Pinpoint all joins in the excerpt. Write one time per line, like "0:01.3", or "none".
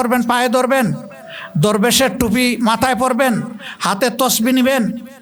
none